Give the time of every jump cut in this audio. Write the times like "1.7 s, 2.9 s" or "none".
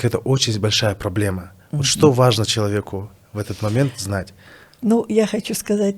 none